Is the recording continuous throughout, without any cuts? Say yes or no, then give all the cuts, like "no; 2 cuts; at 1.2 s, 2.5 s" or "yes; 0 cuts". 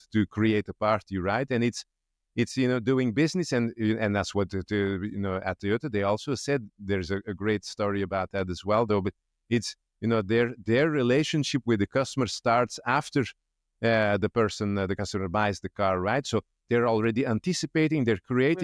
yes; 0 cuts